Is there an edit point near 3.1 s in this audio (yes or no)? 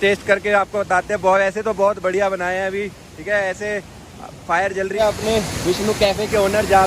no